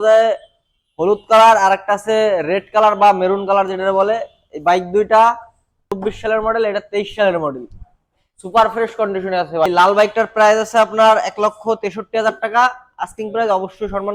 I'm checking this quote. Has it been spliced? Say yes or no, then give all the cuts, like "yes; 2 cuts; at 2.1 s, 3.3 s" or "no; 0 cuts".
yes; 2 cuts; at 5.9 s, 9.7 s